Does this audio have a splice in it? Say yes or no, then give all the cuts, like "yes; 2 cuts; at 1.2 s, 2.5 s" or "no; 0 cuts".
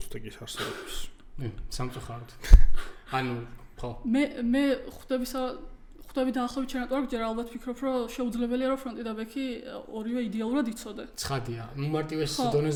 no; 0 cuts